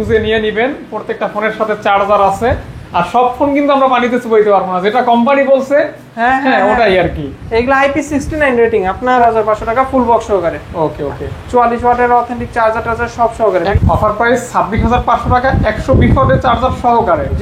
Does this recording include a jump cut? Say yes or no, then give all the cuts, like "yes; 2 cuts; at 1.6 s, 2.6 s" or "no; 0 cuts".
yes; 2 cuts; at 9.2 s, 13.7 s